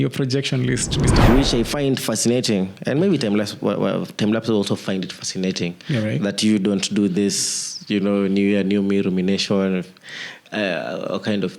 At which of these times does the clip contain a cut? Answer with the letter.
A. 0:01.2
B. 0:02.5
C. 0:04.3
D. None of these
A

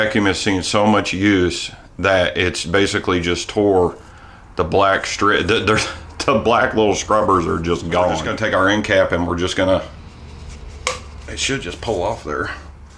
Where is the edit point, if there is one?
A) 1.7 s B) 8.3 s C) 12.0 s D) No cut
B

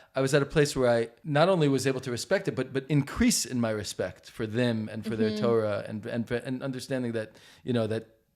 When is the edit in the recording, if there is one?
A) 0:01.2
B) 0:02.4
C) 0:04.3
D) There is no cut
A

